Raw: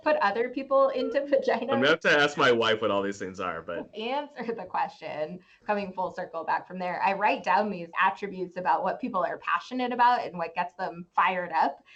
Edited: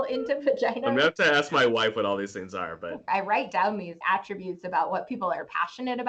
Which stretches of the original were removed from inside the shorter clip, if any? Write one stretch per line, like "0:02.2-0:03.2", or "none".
0:03.9-0:07.0